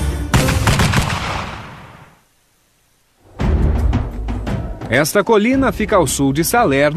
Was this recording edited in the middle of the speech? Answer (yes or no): yes